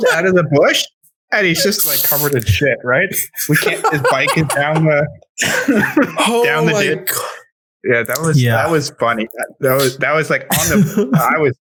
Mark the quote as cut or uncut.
uncut